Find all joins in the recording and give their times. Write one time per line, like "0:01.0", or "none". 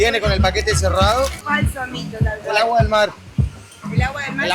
0:01.4